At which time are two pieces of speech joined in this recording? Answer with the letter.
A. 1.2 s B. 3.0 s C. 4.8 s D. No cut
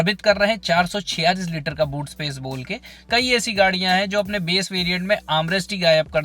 B